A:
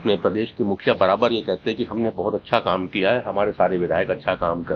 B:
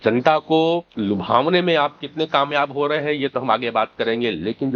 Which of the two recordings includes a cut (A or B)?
B